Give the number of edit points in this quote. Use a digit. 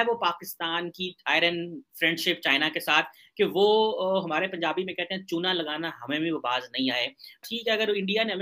1